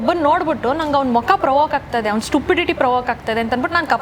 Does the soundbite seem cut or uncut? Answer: uncut